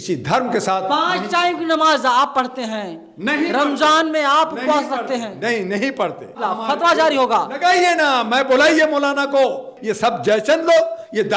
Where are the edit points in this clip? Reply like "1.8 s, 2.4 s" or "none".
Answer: 6.4 s, 9.7 s